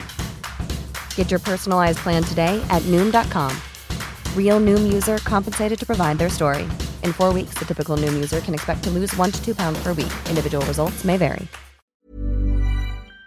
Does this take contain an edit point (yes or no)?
yes